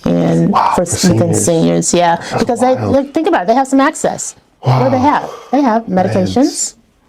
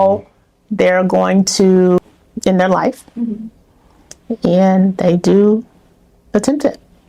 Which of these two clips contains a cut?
second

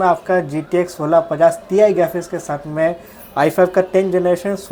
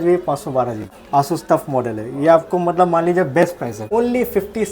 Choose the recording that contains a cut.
second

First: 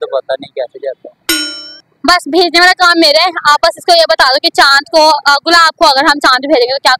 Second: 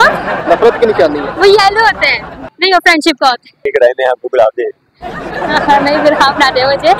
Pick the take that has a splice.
second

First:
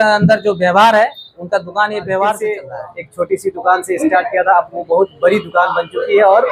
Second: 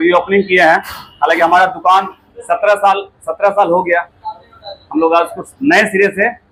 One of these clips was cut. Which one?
first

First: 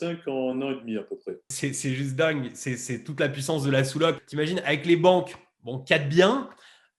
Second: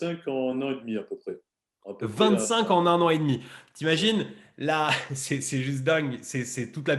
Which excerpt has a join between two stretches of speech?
first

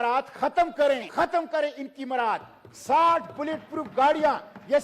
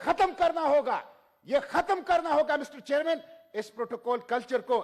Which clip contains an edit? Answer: first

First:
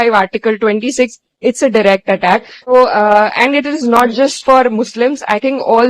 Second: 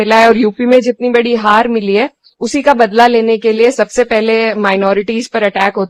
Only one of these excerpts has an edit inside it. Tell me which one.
first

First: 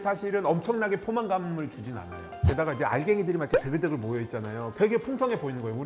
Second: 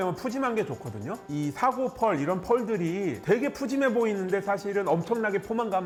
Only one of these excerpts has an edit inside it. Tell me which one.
first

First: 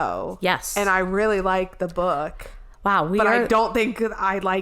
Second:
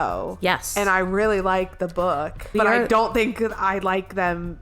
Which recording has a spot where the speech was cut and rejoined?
second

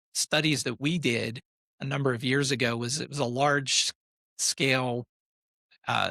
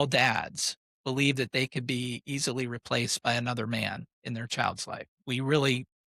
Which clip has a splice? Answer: second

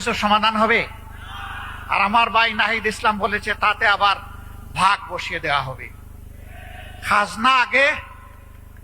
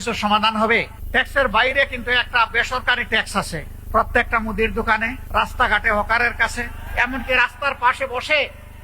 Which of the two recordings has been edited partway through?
second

